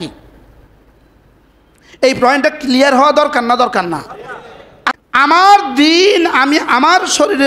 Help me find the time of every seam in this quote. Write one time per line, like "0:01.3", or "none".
0:05.0